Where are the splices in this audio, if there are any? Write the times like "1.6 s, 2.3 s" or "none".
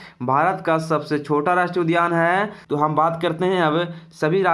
2.6 s